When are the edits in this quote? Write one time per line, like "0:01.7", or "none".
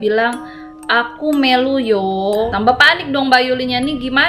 0:02.5